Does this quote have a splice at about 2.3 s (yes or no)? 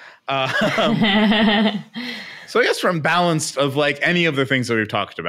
no